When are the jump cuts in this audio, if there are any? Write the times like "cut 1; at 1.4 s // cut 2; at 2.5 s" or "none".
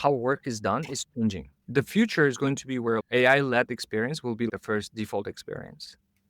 cut 1; at 1.5 s // cut 2; at 3.0 s // cut 3; at 4.5 s

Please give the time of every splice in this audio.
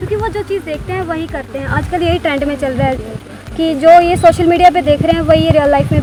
none

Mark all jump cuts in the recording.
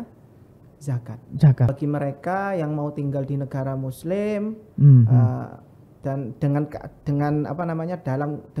cut 1; at 1.7 s

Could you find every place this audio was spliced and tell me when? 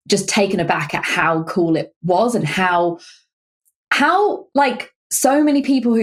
none

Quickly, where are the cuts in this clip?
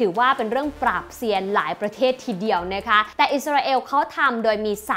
cut 1; at 3.1 s

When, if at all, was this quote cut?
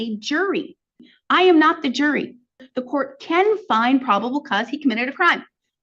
cut 1; at 1.0 s // cut 2; at 2.6 s

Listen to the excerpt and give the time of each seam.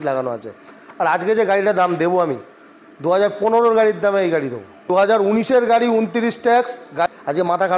cut 1; at 4.9 s // cut 2; at 7.1 s

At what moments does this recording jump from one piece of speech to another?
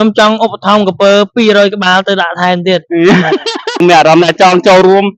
cut 1; at 3.8 s

